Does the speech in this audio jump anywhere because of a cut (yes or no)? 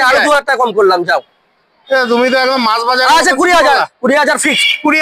no